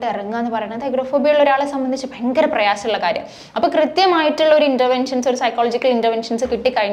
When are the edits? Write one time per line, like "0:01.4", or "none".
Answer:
none